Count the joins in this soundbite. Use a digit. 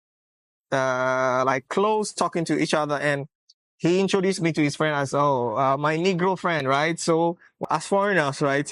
1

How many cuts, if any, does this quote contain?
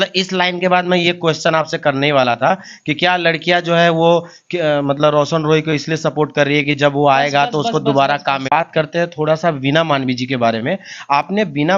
1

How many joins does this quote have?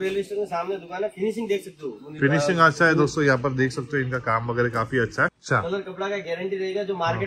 1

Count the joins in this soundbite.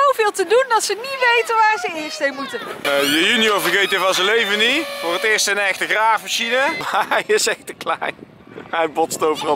2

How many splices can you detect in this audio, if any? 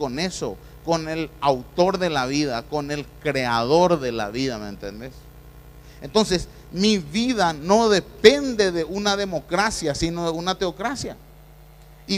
1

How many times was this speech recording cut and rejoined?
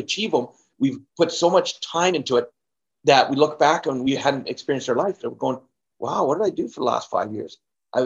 0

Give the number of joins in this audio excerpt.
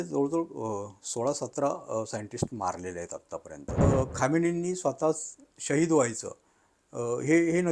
1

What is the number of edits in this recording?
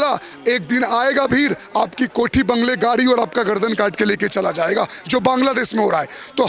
0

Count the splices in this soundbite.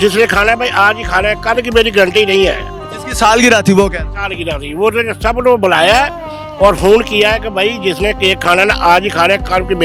0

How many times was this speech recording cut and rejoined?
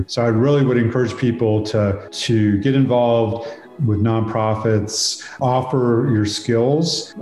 1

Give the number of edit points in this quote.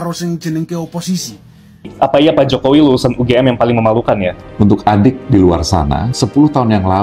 1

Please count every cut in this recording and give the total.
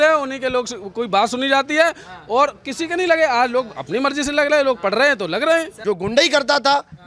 1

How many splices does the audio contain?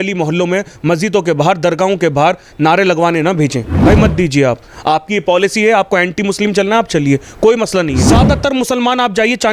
2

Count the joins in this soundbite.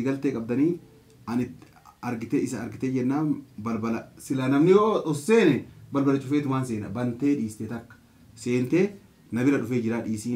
0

